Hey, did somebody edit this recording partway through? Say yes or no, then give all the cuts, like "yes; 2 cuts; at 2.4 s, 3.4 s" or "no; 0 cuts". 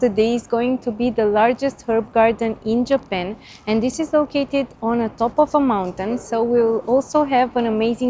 no; 0 cuts